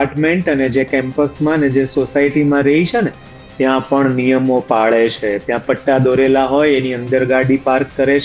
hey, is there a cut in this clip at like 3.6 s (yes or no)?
no